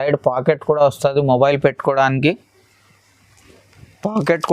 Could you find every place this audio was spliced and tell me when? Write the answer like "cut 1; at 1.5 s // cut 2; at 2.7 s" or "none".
none